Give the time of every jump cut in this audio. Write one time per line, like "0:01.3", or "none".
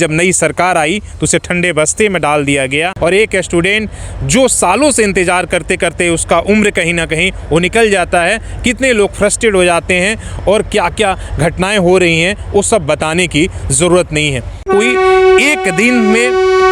0:02.9
0:14.6